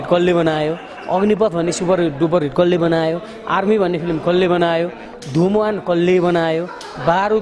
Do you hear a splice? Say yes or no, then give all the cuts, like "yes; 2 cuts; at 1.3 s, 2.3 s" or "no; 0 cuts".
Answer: no; 0 cuts